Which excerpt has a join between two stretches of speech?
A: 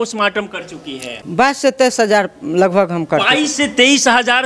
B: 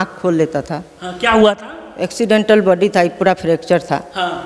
A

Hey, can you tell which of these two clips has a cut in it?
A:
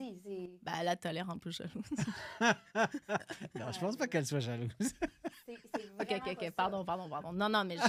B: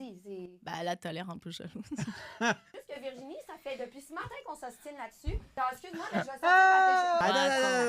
B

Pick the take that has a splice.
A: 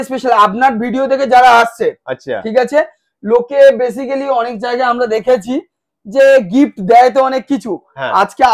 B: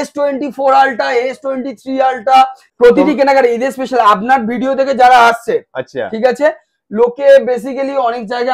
B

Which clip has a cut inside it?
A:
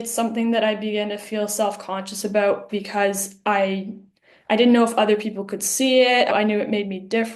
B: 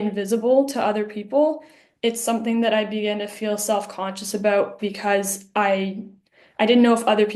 A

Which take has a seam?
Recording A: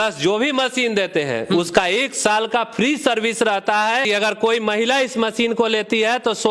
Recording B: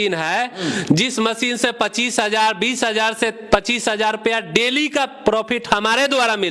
A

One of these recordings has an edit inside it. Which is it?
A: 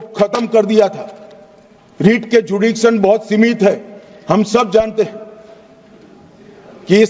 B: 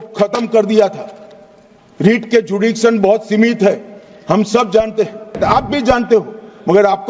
B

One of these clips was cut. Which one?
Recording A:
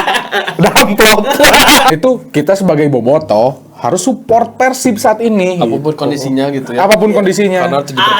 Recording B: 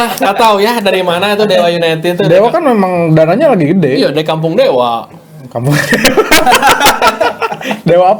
A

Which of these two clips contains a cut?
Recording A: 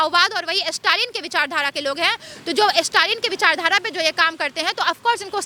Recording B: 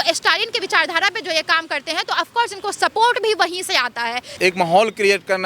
B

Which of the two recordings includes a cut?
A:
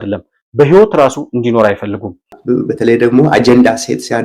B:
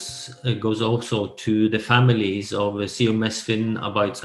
A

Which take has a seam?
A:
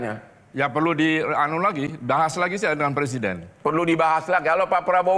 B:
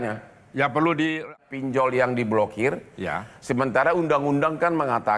B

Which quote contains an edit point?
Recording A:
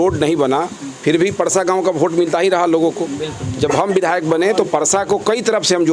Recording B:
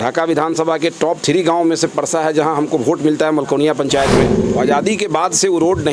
B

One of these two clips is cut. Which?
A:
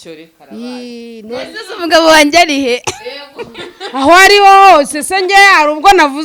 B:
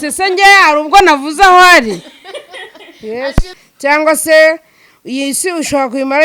B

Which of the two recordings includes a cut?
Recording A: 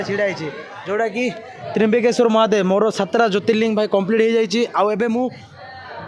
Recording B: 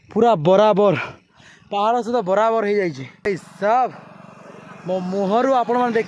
B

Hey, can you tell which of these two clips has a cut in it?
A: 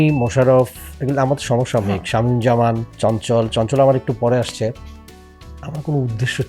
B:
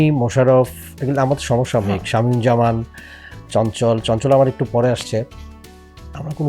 A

